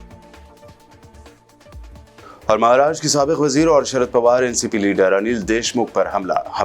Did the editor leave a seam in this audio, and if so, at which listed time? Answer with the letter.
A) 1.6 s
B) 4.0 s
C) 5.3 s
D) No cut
A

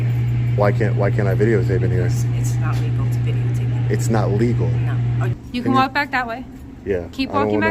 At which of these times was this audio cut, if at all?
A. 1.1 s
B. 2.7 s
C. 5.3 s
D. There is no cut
C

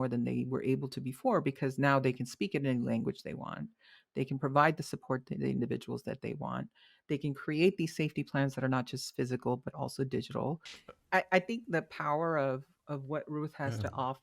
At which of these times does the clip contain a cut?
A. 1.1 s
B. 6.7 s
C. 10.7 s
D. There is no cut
C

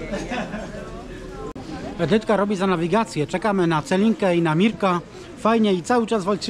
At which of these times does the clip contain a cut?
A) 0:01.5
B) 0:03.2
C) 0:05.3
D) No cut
A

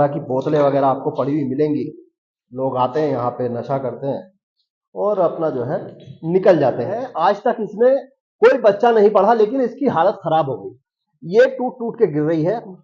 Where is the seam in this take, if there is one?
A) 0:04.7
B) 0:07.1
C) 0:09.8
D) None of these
B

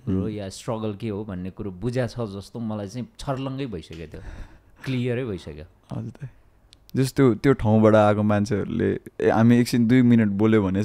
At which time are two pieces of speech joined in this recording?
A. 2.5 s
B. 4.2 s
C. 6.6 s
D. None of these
D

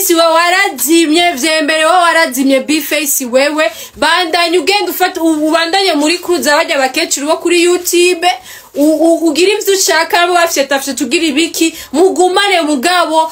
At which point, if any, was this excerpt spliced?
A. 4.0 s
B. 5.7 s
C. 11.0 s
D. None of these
D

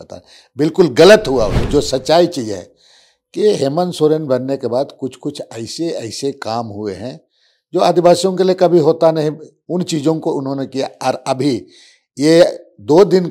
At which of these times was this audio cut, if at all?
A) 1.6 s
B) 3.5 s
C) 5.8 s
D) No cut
A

